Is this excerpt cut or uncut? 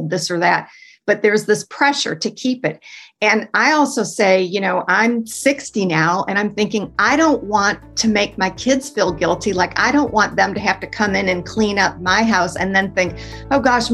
uncut